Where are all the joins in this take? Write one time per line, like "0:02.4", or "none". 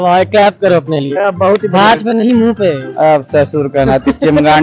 none